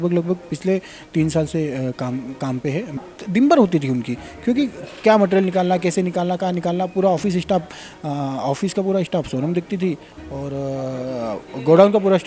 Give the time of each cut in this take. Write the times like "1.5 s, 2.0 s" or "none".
3.0 s